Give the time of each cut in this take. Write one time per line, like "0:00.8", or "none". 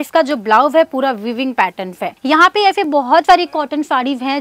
0:02.1